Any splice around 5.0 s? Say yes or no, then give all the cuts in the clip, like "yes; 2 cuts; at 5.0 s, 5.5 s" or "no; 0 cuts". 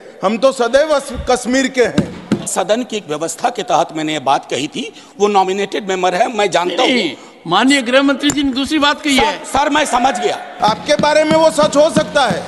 no; 2 cuts; at 2.5 s, 10.5 s